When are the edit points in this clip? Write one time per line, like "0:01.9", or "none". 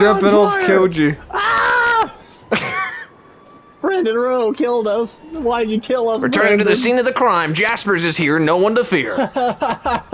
none